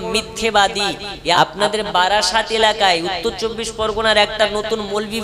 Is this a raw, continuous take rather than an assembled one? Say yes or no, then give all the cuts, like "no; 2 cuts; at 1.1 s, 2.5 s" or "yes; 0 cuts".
no; 1 cut; at 1.4 s